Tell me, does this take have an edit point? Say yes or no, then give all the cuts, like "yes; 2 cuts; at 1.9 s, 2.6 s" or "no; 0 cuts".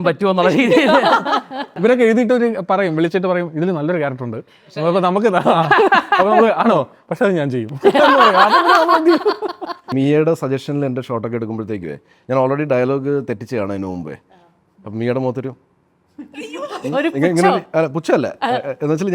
yes; 2 cuts; at 1.7 s, 9.9 s